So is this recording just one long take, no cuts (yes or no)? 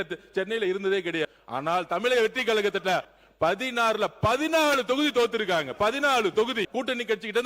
no